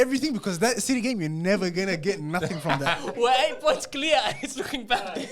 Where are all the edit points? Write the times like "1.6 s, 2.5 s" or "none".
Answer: 3.0 s